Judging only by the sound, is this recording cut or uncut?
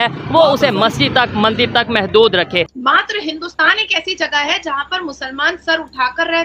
cut